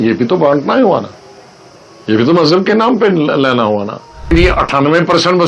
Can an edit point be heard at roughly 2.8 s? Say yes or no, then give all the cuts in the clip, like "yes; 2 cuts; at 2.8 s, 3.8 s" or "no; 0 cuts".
no; 1 cut; at 4.3 s